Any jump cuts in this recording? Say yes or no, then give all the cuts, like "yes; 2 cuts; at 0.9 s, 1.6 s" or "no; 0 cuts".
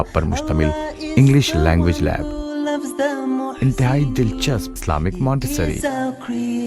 no; 0 cuts